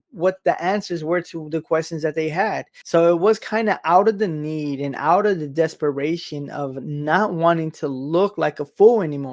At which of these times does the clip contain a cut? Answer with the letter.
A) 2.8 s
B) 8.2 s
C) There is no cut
A